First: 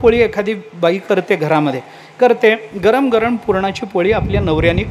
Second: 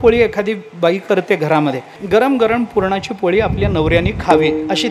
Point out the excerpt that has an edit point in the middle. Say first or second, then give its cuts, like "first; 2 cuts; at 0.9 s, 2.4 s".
second; 1 cut; at 2.0 s